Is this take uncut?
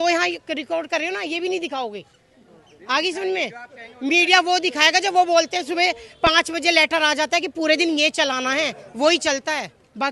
yes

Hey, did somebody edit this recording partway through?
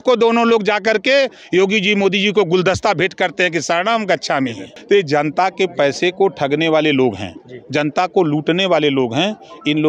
yes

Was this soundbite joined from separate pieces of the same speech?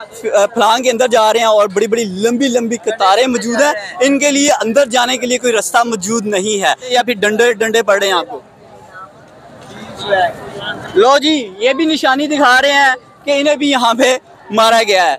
yes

